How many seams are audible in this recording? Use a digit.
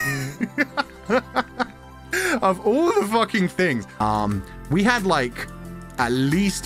1